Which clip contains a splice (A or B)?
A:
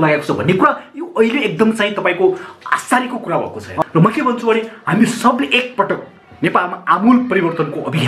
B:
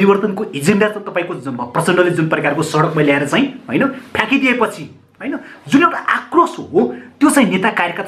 A